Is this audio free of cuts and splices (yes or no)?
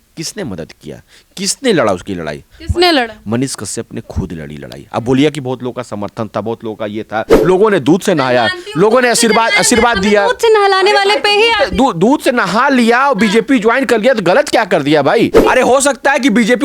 no